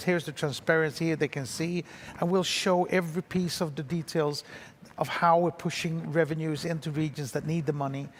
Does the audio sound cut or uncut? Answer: uncut